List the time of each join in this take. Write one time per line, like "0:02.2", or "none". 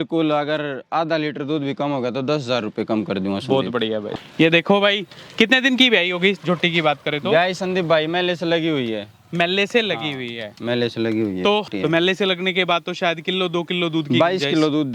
0:04.1
0:11.7